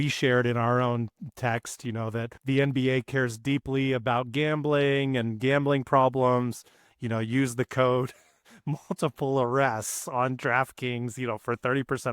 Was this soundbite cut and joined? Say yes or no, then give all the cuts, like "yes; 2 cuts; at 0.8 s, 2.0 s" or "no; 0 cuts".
yes; 1 cut; at 2.3 s